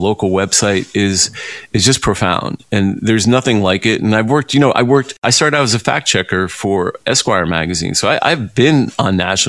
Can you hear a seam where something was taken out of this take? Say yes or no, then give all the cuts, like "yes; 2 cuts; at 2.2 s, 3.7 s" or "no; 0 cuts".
yes; 1 cut; at 5.1 s